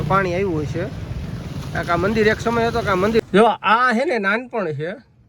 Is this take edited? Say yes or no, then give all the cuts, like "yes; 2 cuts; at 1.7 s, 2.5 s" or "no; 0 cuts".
yes; 1 cut; at 3.2 s